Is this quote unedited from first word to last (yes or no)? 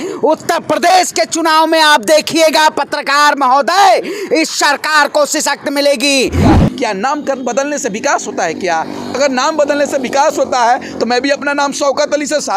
no